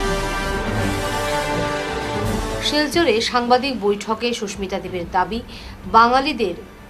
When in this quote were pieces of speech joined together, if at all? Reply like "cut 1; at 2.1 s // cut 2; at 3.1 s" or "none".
cut 1; at 2.2 s